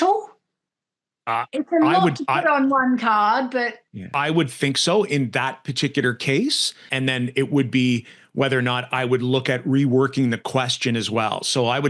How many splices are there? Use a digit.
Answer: 2